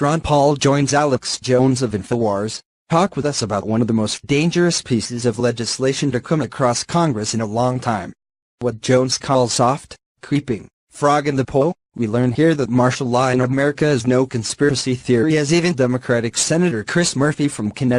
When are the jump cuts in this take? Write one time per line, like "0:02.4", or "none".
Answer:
none